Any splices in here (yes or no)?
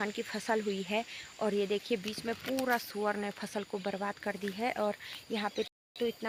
no